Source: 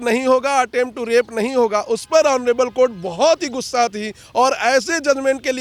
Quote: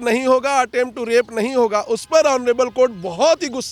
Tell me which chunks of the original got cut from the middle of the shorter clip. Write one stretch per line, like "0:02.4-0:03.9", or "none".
none